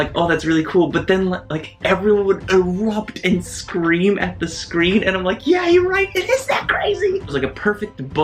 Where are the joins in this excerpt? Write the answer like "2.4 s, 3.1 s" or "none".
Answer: 7.3 s